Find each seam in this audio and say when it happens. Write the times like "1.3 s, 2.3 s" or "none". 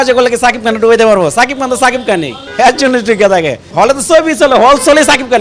2.4 s, 3.6 s